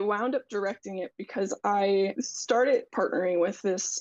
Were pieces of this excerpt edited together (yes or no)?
yes